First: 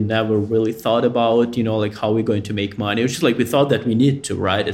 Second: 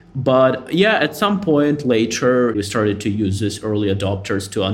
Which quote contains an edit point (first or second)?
second